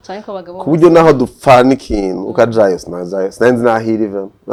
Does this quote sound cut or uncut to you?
uncut